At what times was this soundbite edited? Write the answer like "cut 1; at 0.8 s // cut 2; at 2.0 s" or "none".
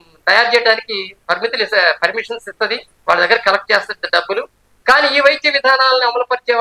cut 1; at 2.9 s

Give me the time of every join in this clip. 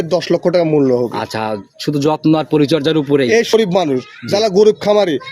cut 1; at 3.5 s

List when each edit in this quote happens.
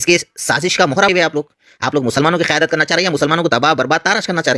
cut 1; at 1.1 s

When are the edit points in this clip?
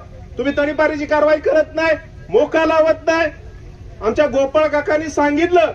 none

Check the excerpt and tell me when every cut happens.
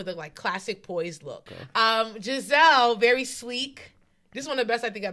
cut 1; at 1.5 s

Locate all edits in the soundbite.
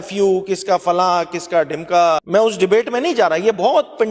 cut 1; at 2.2 s

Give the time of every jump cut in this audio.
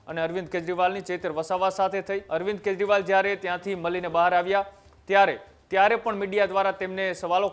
cut 1; at 2.2 s

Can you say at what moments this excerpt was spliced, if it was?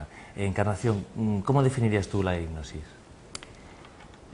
none

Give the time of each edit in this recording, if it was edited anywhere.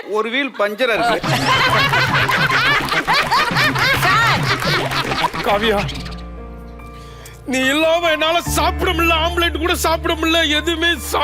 cut 1; at 5.3 s

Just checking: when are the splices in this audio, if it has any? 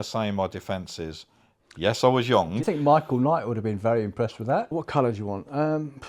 cut 1; at 2.6 s // cut 2; at 4.8 s

